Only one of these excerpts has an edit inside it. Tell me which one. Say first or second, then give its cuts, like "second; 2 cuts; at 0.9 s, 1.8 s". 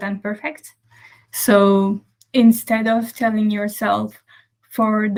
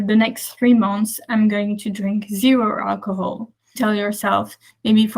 second; 1 cut; at 3.6 s